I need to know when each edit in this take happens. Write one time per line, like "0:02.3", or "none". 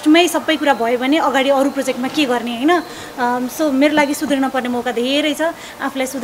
none

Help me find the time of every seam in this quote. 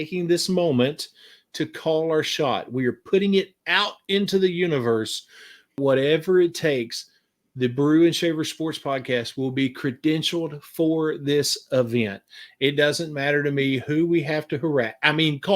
0:05.8

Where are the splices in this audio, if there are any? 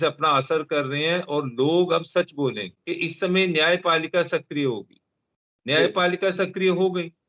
0:02.7

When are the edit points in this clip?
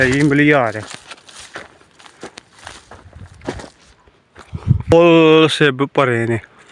0:04.9

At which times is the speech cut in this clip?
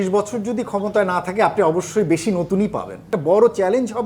0:03.1

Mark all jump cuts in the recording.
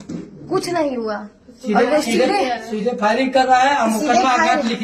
none

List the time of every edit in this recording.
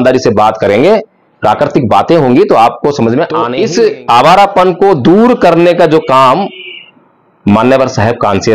0:03.5

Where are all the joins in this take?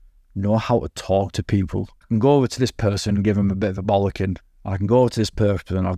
0:01.9

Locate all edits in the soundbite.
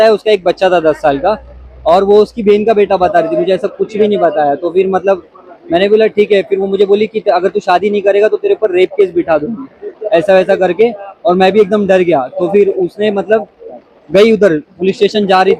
none

